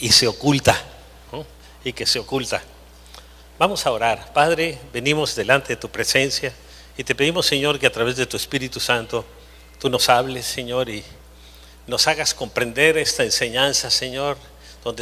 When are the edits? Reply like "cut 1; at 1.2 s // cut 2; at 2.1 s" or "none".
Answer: cut 1; at 7.8 s